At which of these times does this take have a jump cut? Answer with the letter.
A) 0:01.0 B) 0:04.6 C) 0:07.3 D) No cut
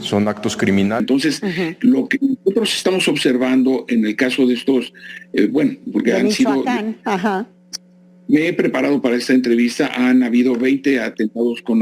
A